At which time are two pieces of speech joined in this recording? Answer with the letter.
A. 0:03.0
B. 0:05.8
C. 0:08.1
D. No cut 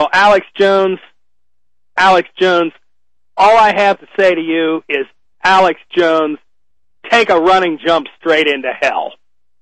A